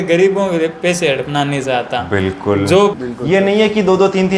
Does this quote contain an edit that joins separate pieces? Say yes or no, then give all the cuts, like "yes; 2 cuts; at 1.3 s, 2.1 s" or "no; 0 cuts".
yes; 1 cut; at 3.0 s